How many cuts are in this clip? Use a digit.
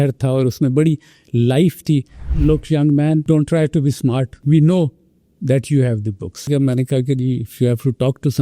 4